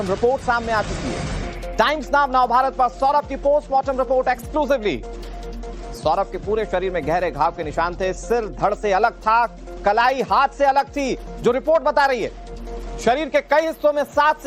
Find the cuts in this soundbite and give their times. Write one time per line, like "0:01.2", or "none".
0:09.6